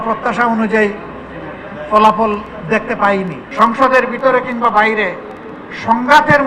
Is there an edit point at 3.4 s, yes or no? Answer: yes